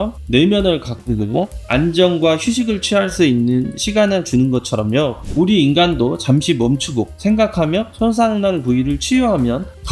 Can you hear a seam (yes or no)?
no